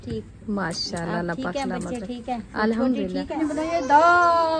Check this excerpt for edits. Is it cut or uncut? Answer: cut